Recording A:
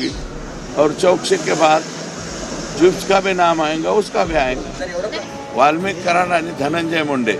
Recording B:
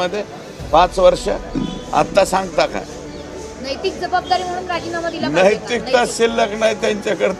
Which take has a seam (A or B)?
A